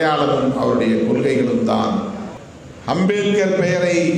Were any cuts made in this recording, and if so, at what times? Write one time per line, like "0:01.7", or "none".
0:02.5